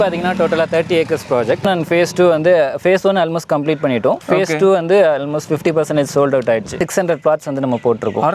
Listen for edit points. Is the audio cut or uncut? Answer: cut